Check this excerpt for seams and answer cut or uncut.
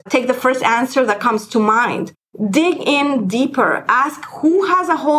uncut